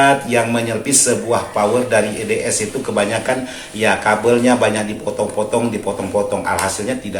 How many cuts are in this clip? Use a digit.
0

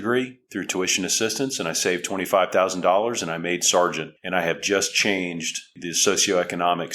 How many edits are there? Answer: 1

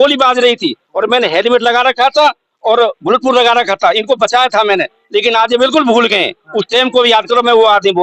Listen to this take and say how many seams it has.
0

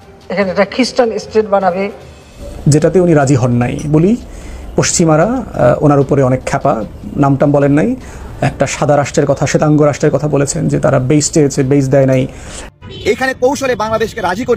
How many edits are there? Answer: 1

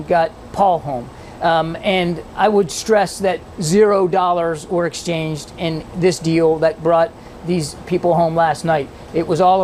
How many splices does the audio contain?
0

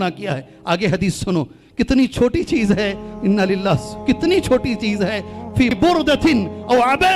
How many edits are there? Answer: 1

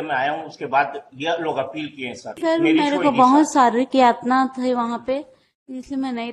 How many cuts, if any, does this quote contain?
1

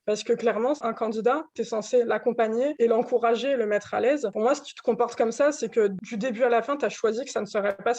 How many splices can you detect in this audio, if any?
4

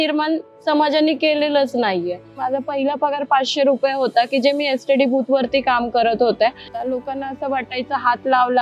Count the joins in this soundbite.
2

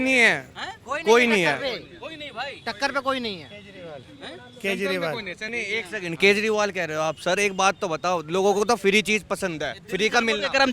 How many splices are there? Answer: 1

